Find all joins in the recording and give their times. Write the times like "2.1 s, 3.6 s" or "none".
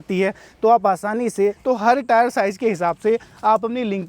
1.6 s